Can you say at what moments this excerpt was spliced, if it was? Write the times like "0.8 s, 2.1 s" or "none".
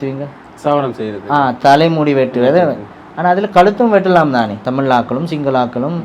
4.6 s